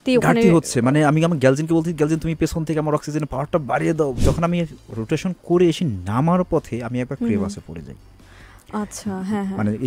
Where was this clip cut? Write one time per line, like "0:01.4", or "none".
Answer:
0:04.2